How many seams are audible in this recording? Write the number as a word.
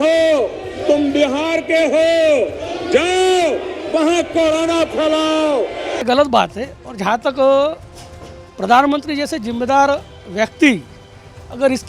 one